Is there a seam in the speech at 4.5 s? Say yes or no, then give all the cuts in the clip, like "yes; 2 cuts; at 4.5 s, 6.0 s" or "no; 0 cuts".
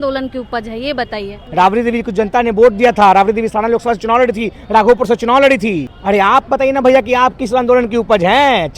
no; 2 cuts; at 1.4 s, 5.9 s